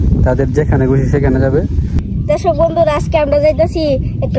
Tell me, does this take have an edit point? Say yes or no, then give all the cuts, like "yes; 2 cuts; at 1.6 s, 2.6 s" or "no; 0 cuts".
yes; 1 cut; at 2.1 s